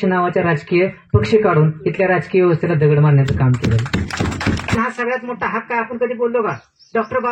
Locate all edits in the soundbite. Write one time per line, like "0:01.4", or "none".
0:04.8